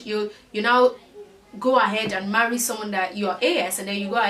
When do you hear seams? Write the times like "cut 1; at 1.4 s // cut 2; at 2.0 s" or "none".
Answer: none